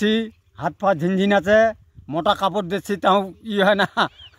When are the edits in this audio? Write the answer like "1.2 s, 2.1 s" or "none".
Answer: none